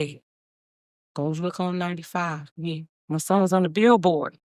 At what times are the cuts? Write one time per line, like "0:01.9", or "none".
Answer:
none

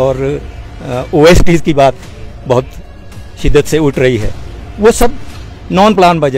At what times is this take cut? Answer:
none

